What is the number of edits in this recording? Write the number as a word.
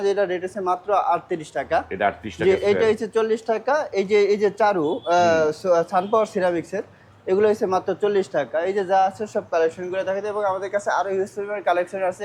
zero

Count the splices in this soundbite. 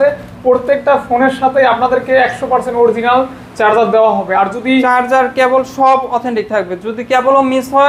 zero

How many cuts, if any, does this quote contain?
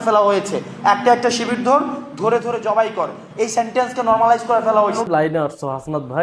one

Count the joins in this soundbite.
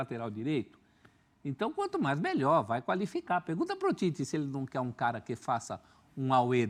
zero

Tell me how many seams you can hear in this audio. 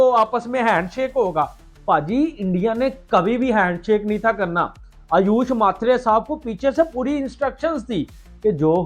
zero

